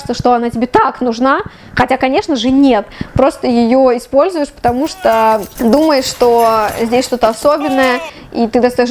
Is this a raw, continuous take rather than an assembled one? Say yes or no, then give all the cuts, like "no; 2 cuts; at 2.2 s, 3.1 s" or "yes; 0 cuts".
yes; 0 cuts